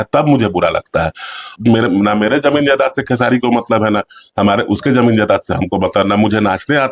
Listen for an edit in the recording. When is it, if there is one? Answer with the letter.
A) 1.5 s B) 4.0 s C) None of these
A